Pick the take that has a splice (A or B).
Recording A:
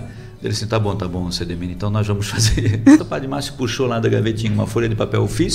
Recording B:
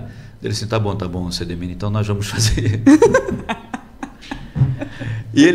A